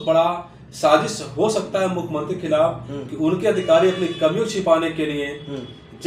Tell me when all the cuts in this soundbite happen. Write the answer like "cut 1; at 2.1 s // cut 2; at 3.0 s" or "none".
none